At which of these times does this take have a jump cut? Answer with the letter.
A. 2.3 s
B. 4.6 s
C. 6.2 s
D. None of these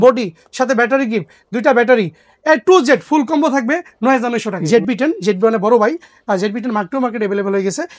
B